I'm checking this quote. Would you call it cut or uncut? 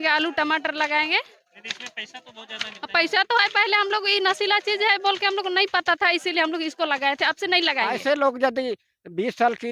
cut